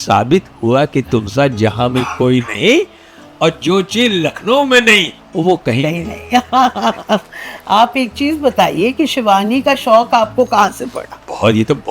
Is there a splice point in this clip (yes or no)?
no